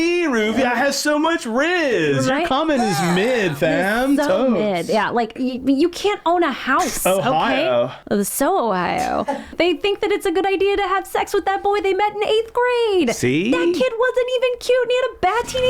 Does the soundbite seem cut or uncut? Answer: cut